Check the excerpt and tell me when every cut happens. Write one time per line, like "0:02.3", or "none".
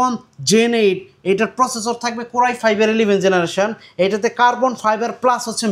none